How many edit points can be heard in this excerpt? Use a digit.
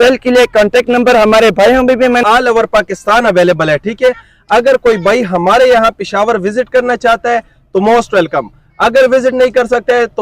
1